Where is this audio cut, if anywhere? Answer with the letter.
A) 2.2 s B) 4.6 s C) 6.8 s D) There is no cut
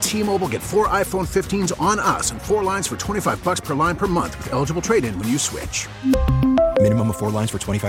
D